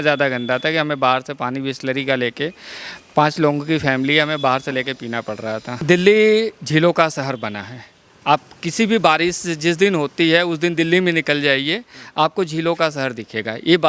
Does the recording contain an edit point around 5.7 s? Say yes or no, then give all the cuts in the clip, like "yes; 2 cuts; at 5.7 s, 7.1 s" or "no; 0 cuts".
yes; 1 cut; at 5.7 s